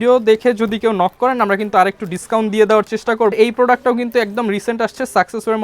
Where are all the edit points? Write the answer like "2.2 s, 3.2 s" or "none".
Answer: 3.3 s